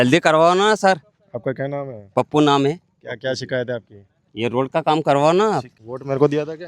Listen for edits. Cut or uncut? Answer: cut